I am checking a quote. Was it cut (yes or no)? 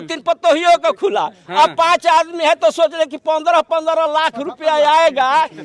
no